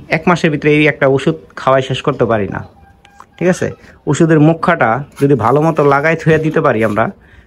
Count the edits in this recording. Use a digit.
0